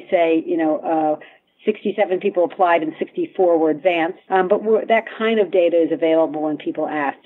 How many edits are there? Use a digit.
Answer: 1